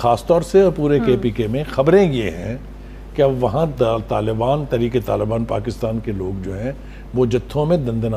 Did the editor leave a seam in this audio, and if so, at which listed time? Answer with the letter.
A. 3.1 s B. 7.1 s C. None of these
C